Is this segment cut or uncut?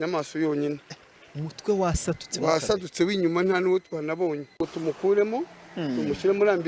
uncut